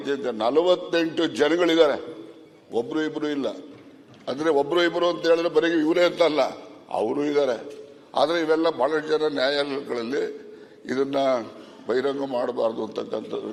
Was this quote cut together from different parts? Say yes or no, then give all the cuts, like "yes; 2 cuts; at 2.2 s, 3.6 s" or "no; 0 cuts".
no; 0 cuts